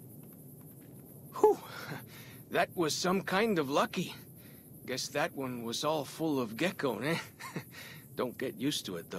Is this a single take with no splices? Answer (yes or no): no